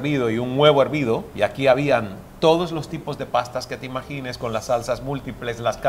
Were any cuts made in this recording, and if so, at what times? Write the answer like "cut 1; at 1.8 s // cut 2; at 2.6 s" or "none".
cut 1; at 1.3 s